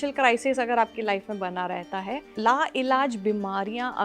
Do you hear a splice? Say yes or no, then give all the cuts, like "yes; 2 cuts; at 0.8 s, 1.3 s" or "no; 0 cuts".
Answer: yes; 1 cut; at 2.3 s